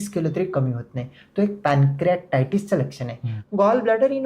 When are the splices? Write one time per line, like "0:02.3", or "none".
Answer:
0:03.3